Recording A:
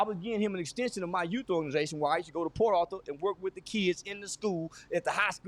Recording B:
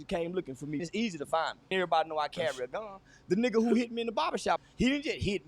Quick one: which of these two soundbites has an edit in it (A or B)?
B